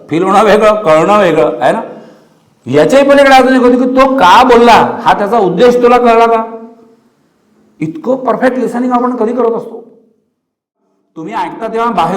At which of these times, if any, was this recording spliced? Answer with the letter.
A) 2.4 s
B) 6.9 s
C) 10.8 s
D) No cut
C